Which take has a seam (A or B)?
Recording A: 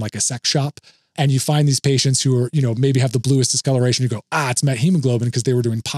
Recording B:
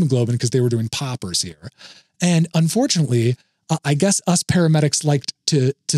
A